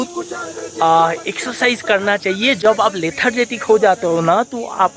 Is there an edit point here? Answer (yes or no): no